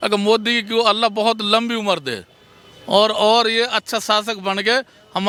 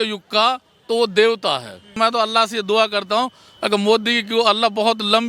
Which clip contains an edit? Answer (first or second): second